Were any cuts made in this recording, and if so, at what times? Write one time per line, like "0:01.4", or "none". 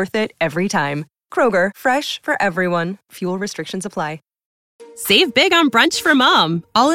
0:04.3